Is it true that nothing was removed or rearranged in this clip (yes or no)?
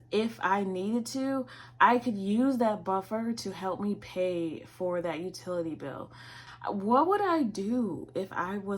no